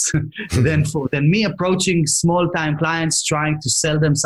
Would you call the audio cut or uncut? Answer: uncut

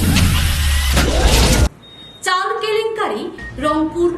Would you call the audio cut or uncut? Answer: cut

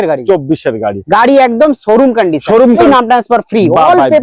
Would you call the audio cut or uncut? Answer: cut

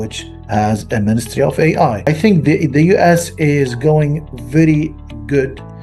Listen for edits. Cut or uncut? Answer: cut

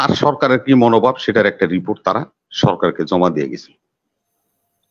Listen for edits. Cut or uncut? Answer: uncut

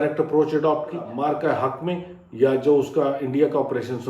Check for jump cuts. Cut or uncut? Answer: cut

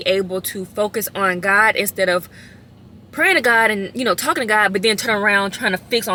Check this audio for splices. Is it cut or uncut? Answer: uncut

